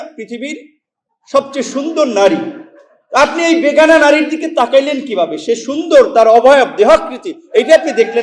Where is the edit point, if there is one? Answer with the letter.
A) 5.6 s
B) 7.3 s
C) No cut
C